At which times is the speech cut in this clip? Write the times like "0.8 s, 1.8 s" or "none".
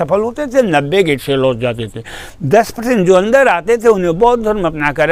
none